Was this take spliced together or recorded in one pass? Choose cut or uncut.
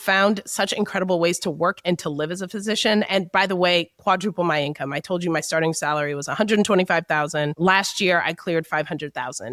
uncut